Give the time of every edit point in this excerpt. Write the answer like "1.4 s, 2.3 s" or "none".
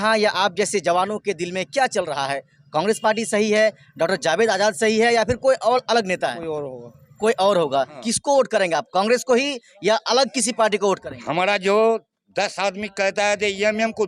8.0 s